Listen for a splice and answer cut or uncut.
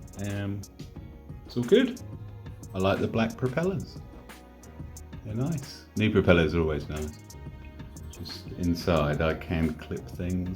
cut